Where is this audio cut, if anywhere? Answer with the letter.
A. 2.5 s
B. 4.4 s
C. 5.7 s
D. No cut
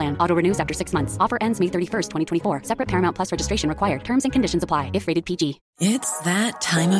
C